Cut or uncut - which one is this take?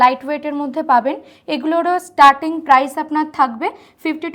uncut